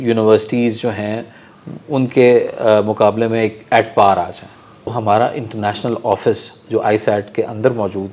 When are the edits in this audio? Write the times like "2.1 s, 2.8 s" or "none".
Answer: 4.9 s